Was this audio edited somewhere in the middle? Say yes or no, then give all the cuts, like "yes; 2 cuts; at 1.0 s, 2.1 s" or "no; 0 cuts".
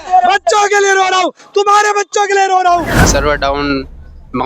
yes; 1 cut; at 3.0 s